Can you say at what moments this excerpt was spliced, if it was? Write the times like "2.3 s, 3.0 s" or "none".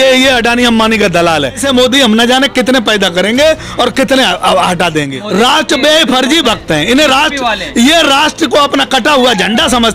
1.6 s, 5.2 s